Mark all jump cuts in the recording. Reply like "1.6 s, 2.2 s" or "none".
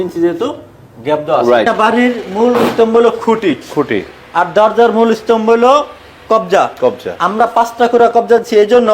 1.7 s

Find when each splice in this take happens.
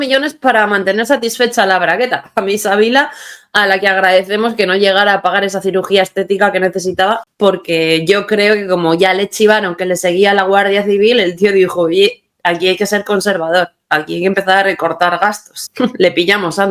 none

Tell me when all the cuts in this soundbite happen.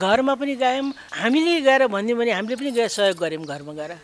1.1 s

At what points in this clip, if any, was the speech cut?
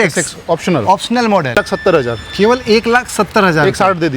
1.6 s

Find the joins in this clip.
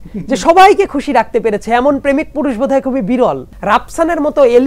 3.5 s

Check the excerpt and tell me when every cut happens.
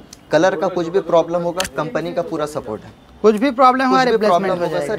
none

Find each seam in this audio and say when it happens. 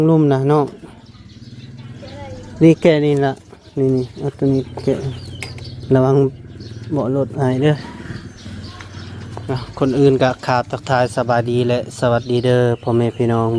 none

